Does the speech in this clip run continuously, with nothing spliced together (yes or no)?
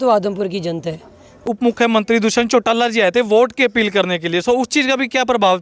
no